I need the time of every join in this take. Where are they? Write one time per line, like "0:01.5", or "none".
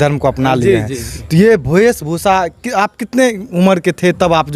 none